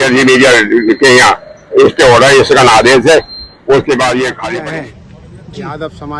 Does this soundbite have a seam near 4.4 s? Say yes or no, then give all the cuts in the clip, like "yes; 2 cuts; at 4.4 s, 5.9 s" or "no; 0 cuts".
yes; 1 cut; at 4.4 s